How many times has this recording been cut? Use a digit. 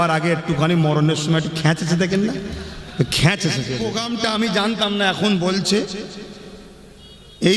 1